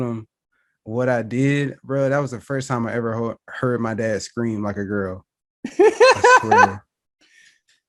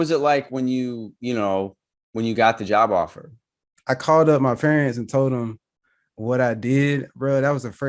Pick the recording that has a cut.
second; 1 cut; at 3.7 s

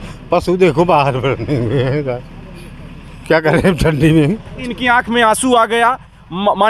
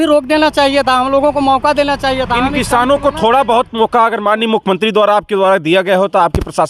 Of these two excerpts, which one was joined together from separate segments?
first; 1 cut; at 4.6 s

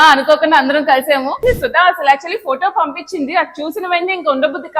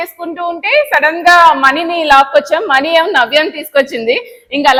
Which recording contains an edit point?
first; 1 cut; at 1.4 s

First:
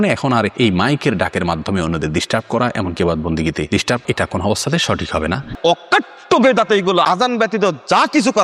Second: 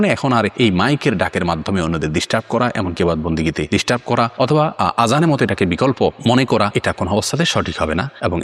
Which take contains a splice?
first; 3 cuts; at 4.0 s, 5.6 s, 7.0 s

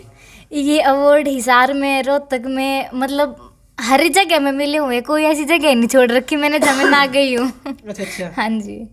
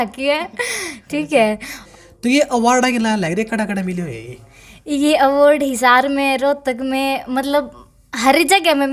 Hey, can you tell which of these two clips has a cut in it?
second; 1 cut; at 1.8 s

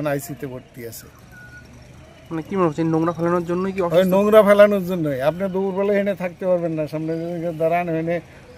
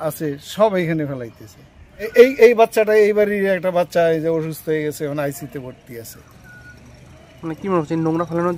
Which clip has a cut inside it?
second; 1 cut; at 2.1 s

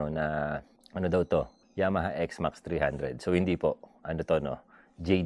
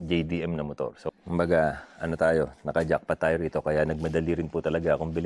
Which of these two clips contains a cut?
second; 1 cut; at 1.1 s

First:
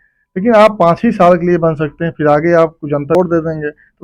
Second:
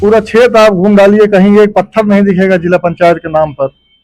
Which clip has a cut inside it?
first; 1 cut; at 3.1 s

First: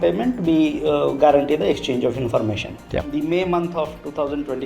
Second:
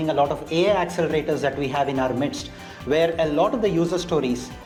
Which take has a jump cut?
first; 1 cut; at 3.1 s

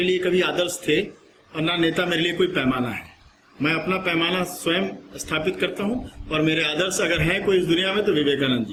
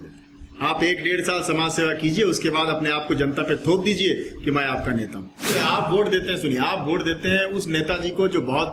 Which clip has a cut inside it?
second; 1 cut; at 5.5 s

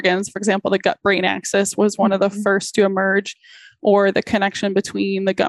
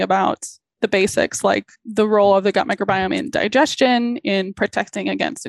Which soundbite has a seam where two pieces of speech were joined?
second; 2 cuts; at 0.8 s, 1.8 s

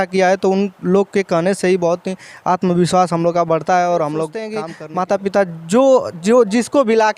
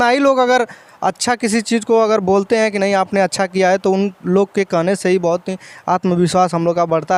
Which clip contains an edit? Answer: first; 1 cut; at 4.9 s

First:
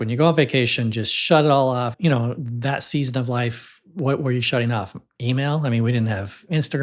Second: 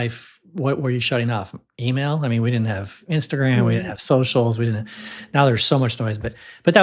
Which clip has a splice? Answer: first; 1 cut; at 1.9 s

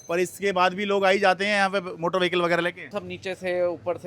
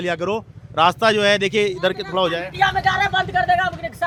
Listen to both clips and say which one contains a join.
first; 1 cut; at 2.9 s

